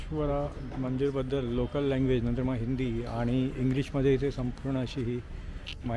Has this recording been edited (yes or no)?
no